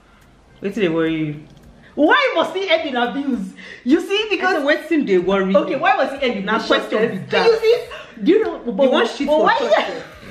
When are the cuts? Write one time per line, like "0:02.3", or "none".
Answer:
none